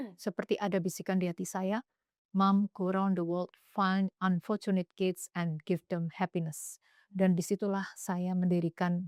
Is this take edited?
no; 0 cuts

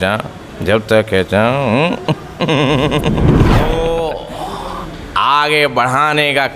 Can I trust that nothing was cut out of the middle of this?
no; 1 cut; at 3.6 s

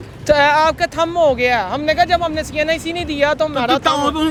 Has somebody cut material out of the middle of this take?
no; 0 cuts

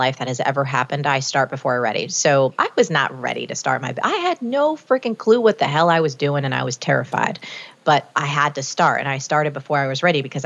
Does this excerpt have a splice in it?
yes; 1 cut; at 2.5 s

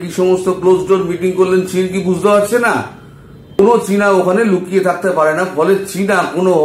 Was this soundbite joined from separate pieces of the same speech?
yes; 1 cut; at 3.6 s

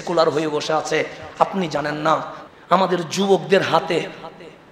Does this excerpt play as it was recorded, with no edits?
no; 1 cut; at 2.4 s

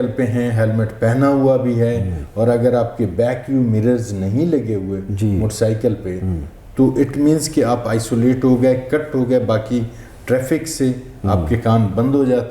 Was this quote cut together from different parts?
no; 0 cuts

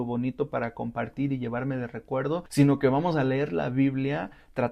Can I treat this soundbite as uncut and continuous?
no; 1 cut; at 2.5 s

